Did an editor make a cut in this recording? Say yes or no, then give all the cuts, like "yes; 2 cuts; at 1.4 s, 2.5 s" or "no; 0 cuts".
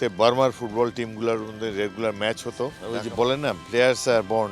yes; 1 cut; at 2.8 s